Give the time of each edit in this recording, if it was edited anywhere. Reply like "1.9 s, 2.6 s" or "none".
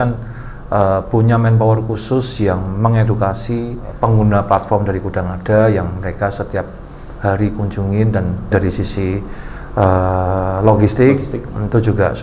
3.9 s, 8.5 s

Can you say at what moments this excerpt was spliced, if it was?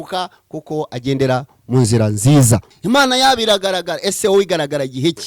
2.7 s

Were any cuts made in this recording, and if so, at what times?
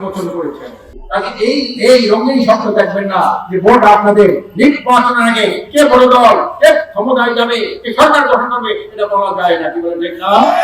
1.0 s

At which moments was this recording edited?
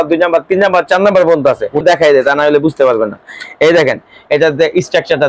1.8 s

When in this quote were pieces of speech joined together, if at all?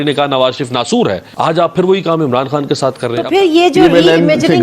1.2 s, 3.2 s

